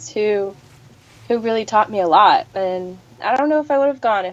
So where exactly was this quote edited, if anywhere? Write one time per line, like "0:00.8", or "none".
none